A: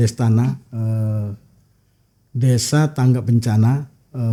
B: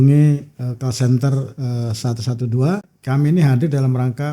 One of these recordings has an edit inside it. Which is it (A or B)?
B